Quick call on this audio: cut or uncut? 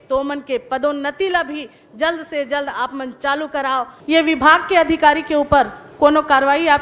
cut